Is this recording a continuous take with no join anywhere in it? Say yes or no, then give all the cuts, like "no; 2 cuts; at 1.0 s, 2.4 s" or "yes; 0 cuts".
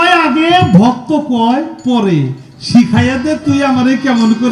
yes; 0 cuts